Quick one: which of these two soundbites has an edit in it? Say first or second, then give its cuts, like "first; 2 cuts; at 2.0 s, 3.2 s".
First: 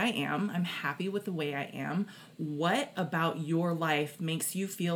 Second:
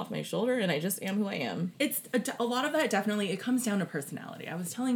second; 1 cut; at 1.7 s